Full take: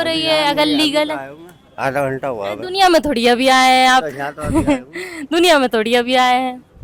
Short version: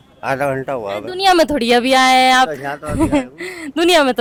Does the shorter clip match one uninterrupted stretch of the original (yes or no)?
yes